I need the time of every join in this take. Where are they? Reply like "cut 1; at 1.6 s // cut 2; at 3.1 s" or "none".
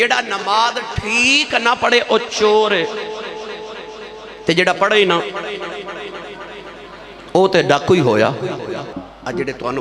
cut 1; at 8.9 s